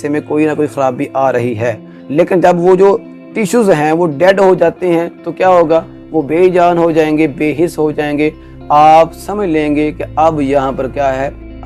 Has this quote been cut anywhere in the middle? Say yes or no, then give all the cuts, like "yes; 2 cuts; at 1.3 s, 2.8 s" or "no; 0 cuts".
no; 0 cuts